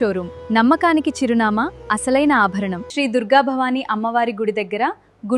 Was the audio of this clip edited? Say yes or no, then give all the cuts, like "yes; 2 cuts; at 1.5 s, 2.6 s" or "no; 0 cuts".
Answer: yes; 1 cut; at 2.8 s